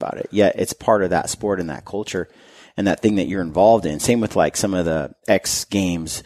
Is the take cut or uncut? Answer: uncut